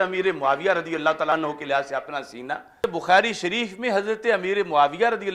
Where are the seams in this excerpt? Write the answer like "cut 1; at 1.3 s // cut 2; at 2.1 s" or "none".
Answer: cut 1; at 1.3 s // cut 2; at 2.8 s